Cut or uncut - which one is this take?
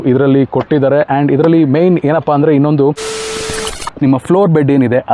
cut